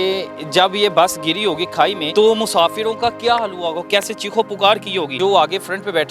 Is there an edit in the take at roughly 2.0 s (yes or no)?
yes